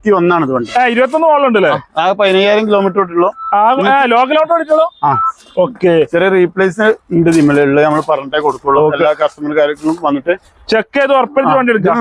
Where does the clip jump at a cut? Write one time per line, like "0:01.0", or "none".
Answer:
none